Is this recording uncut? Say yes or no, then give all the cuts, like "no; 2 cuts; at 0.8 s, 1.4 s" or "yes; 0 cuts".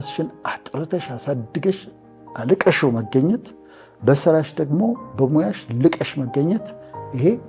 yes; 0 cuts